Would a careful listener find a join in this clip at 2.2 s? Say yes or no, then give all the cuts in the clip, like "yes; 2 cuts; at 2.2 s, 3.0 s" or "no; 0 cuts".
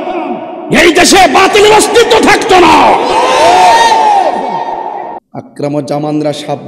no; 1 cut; at 5.1 s